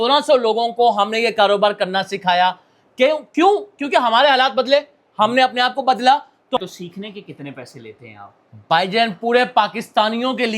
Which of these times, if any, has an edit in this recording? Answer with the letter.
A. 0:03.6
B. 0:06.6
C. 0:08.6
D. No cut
B